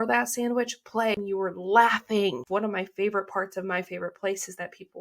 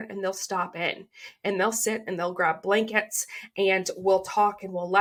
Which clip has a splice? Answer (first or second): first